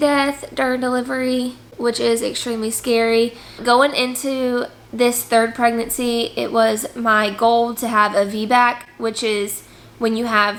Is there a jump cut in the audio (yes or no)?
no